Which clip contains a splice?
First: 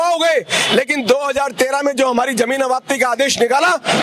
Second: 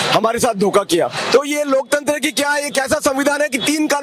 second; 1 cut; at 1.2 s

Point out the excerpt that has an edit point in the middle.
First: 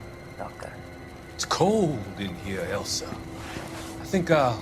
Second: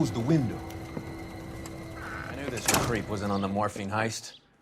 second; 1 cut; at 2.9 s

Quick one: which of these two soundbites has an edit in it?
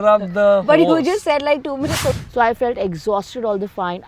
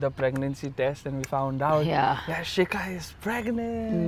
first; 1 cut; at 2.1 s

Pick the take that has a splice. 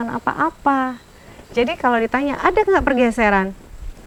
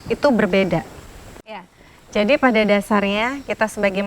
second; 1 cut; at 1.6 s

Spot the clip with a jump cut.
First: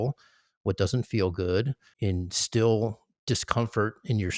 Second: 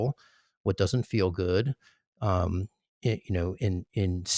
first; 1 cut; at 1.9 s

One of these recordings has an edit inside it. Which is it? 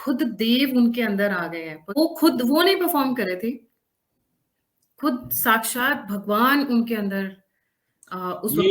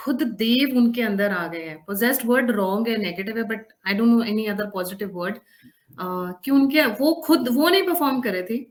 first; 1 cut; at 1.9 s

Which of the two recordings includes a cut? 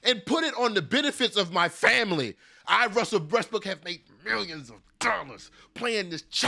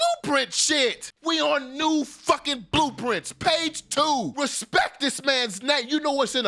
second; 2 cuts; at 1.1 s, 4.3 s

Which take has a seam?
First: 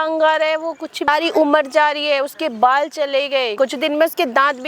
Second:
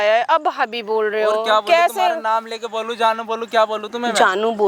first; 2 cuts; at 1.1 s, 3.5 s

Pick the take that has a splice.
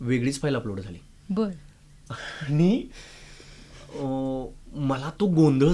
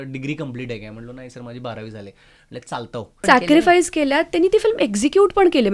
second; 1 cut; at 3.2 s

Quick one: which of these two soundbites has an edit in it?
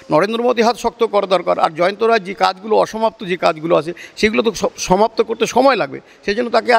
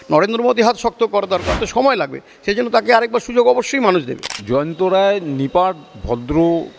second; 2 cuts; at 1.5 s, 4.3 s

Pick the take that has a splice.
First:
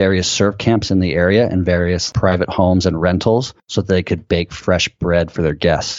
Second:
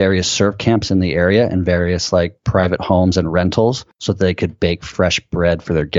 first; 1 cut; at 2.0 s

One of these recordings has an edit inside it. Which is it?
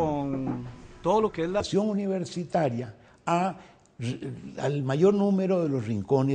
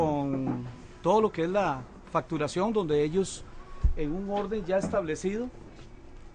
second; 1 cut; at 1.6 s

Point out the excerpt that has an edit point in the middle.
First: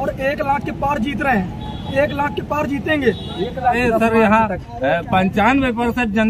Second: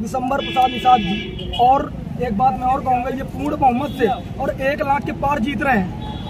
first; 1 cut; at 3.8 s

